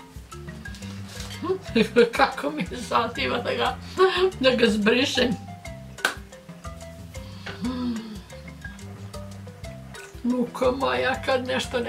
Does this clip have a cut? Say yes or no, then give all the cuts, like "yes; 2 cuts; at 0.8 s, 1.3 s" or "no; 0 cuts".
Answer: yes; 1 cut; at 1.4 s